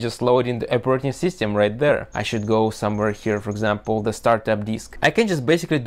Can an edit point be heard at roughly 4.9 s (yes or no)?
yes